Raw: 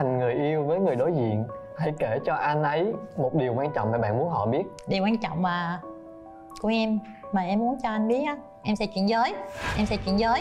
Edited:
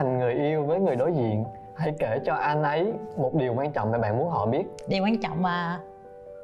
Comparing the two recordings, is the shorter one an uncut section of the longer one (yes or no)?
yes